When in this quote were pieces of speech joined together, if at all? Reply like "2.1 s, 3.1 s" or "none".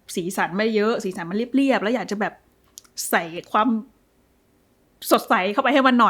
none